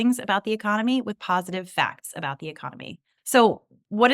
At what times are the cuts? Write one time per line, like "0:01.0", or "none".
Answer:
0:03.2